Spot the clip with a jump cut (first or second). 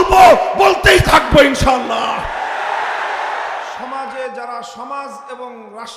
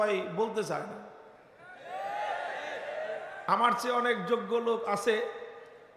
first